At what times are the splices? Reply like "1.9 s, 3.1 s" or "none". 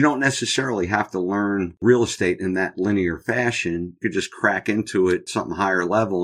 1.8 s, 5.2 s